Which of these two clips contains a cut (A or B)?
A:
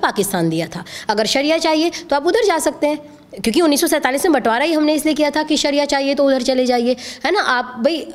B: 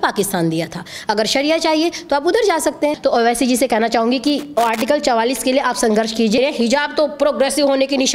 B